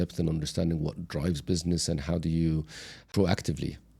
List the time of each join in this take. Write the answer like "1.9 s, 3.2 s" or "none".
3.1 s

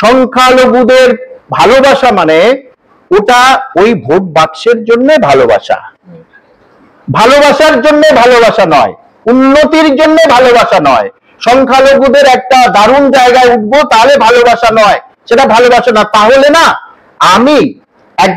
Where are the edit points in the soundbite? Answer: none

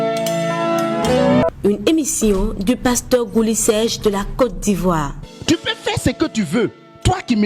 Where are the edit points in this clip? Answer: 1.4 s

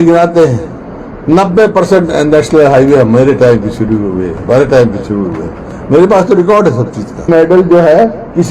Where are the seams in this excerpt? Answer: 7.3 s

